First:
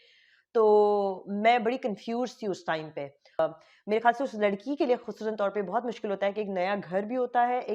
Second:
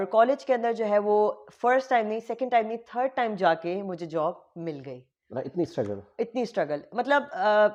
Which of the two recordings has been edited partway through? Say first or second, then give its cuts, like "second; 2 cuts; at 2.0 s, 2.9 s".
first; 1 cut; at 3.4 s